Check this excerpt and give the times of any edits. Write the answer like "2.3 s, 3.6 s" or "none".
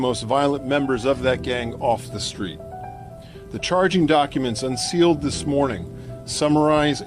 3.0 s